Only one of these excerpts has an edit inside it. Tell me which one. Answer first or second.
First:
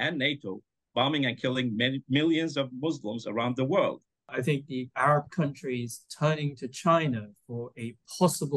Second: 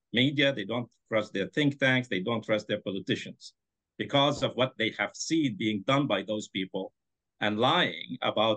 first